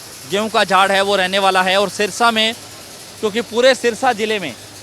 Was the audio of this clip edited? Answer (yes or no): no